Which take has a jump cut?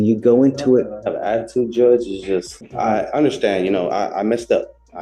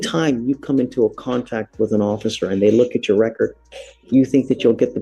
first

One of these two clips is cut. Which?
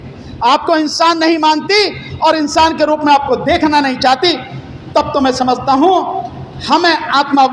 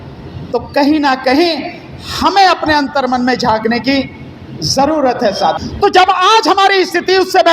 second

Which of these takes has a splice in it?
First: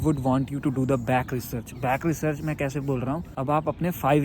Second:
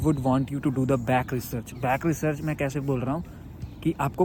first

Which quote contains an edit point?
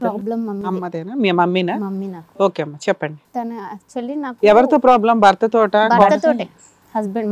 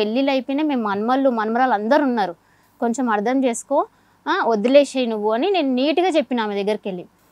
first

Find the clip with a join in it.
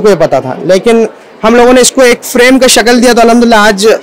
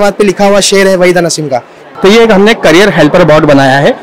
second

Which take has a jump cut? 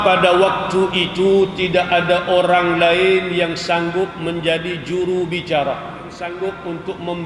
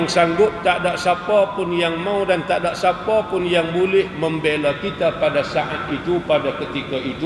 first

